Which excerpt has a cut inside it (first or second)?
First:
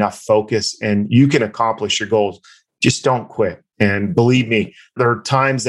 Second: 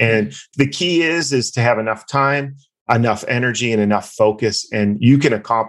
first